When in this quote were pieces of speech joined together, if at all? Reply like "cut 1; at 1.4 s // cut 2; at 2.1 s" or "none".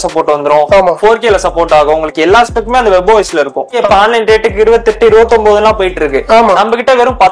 cut 1; at 3.8 s